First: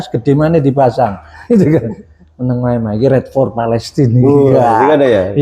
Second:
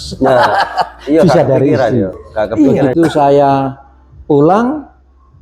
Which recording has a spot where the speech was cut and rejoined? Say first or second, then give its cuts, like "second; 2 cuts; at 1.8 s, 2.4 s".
second; 1 cut; at 2.9 s